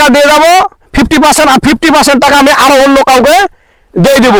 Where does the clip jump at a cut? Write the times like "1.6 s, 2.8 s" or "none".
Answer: none